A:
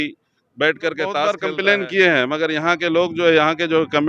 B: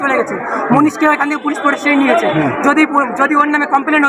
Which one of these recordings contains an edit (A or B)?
A